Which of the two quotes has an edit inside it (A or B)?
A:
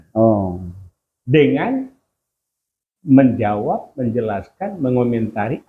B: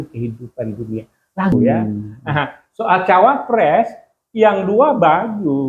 B